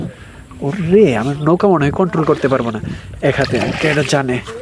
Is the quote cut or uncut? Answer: uncut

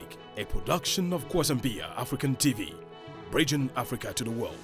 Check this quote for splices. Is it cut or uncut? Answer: uncut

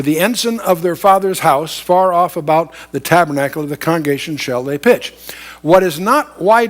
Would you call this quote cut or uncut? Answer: cut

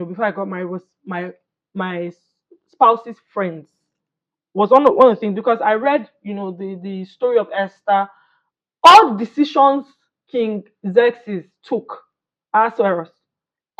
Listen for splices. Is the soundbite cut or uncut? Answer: uncut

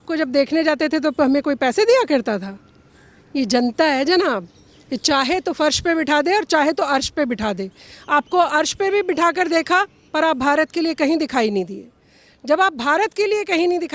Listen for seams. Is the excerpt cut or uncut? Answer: uncut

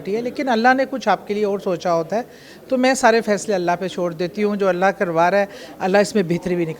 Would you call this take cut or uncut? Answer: uncut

